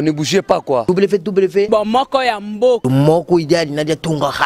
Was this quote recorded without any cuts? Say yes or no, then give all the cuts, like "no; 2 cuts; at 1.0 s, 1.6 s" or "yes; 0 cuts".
yes; 0 cuts